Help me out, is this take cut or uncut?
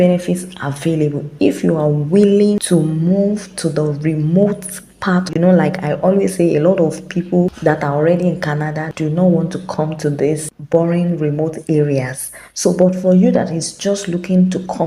cut